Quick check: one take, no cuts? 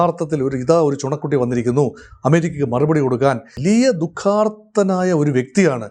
no; 1 cut; at 3.5 s

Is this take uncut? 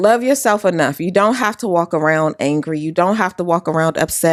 yes; 0 cuts

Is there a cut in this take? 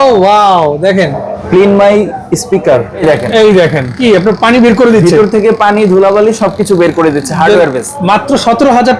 yes; 4 cuts; at 1.3 s, 3.0 s, 4.0 s, 7.9 s

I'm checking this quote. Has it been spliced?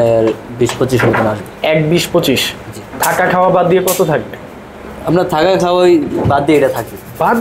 no; 0 cuts

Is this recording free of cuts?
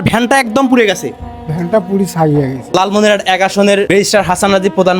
no; 2 cuts; at 2.7 s, 3.9 s

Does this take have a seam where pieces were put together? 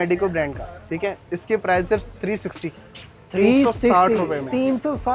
no; 0 cuts

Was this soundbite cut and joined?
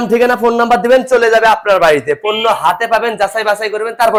no; 0 cuts

